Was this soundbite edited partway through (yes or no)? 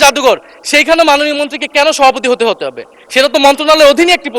no